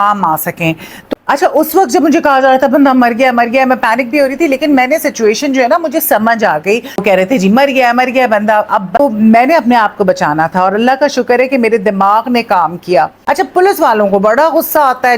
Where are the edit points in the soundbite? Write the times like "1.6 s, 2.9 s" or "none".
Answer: 1.3 s, 7.0 s, 9.0 s, 13.2 s